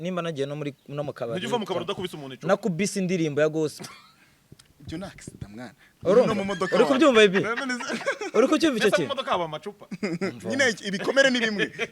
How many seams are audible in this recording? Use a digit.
0